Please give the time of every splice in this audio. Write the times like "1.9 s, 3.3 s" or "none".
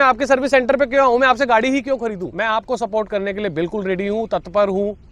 2.3 s